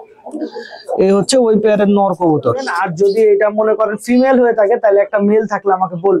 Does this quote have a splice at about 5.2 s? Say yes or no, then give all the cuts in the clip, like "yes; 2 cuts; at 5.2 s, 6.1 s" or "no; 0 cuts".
no; 1 cut; at 2.9 s